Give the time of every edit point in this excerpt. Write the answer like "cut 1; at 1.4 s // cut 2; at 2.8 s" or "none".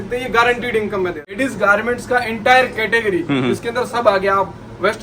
cut 1; at 1.3 s